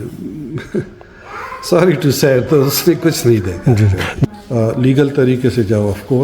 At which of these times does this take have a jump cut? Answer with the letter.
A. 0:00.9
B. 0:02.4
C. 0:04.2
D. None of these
C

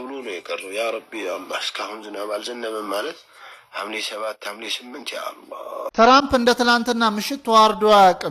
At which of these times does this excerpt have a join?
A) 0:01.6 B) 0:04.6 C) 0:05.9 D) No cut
C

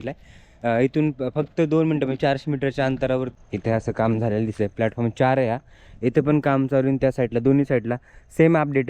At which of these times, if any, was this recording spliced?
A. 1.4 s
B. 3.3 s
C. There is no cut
B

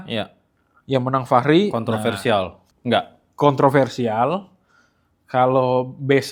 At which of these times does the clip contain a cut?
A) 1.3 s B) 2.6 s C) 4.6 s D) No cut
D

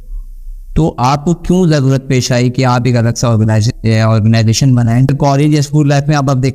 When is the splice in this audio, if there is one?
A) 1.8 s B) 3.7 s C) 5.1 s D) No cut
C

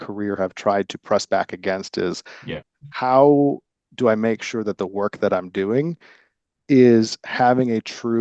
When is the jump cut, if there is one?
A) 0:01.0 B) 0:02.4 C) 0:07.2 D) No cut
D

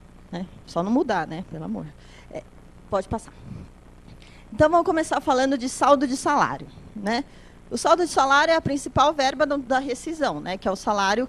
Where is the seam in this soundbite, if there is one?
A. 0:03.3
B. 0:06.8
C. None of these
A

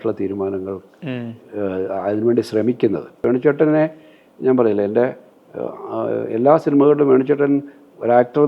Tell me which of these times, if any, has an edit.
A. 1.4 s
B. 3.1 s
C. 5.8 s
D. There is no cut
B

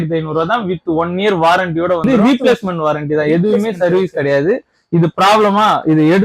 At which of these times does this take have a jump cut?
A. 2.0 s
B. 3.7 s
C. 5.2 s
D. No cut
A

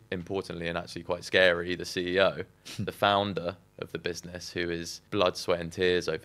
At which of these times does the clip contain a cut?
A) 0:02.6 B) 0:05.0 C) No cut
B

